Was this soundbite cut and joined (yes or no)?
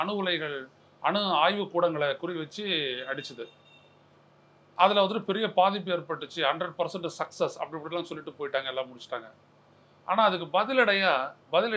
no